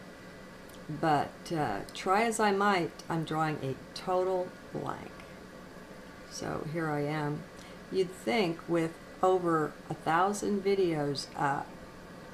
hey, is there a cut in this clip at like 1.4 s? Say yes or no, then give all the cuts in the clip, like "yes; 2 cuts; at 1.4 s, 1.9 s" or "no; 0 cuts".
yes; 1 cut; at 1.4 s